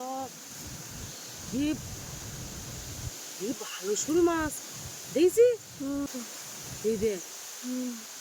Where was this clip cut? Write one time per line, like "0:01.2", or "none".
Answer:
0:06.1